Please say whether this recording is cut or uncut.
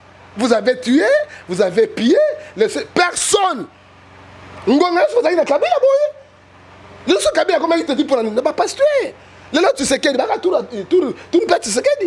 uncut